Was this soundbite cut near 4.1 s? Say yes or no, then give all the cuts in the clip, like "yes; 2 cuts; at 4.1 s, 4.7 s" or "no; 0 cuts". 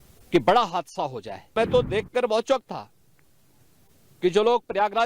no; 1 cut; at 1.5 s